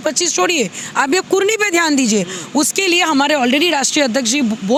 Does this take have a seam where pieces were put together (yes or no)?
no